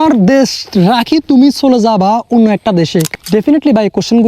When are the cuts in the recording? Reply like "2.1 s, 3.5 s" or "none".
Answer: 3.1 s